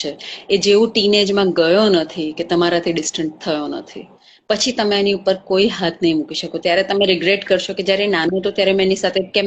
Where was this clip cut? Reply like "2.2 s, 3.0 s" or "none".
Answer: none